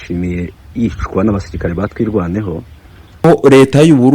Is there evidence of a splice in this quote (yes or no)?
yes